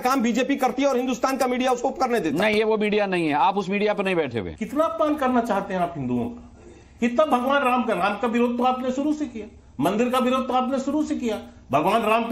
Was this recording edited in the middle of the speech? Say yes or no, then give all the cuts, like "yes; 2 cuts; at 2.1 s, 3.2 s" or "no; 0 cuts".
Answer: yes; 1 cut; at 4.6 s